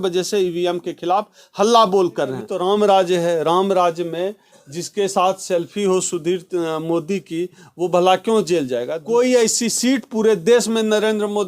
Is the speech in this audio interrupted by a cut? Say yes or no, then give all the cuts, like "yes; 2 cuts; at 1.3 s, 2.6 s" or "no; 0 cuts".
yes; 2 cuts; at 2.5 s, 9.0 s